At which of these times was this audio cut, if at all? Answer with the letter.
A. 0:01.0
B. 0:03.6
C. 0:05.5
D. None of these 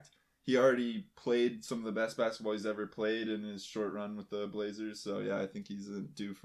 D